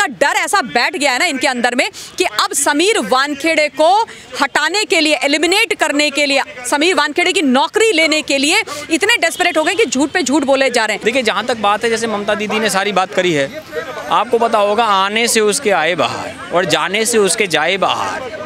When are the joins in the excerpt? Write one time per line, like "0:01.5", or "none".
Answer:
0:11.0